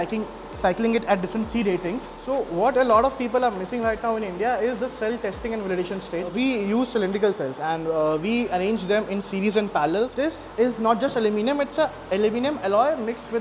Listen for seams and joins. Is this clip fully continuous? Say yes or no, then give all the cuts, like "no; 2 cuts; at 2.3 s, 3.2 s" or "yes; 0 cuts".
no; 3 cuts; at 2.1 s, 6.3 s, 10.1 s